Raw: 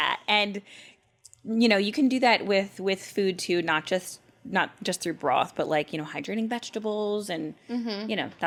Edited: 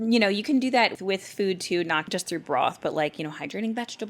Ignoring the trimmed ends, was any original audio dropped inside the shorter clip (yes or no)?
yes